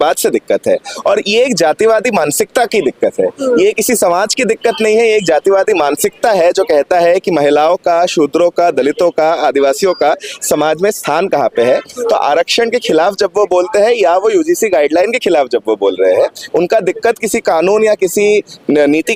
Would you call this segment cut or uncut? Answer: uncut